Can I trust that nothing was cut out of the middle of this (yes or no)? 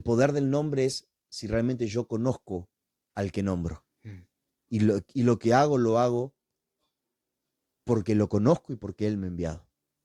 yes